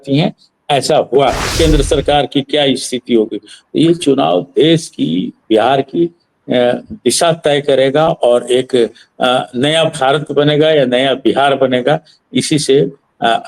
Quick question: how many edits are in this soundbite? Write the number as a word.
one